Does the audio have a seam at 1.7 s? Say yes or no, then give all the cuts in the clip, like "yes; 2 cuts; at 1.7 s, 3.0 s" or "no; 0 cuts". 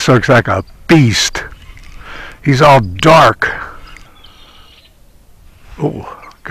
no; 1 cut; at 4.3 s